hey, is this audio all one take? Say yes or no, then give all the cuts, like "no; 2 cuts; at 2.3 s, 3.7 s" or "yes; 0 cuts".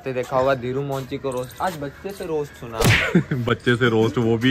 yes; 0 cuts